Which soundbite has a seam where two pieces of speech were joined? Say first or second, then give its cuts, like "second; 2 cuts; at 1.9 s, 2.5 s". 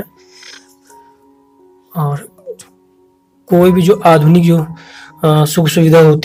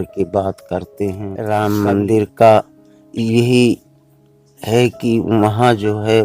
second; 1 cut; at 1.3 s